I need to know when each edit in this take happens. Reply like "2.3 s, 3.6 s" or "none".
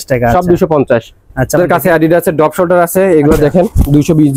1.6 s